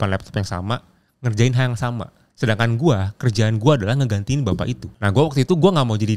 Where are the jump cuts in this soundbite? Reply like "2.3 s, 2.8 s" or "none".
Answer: 2.2 s, 4.9 s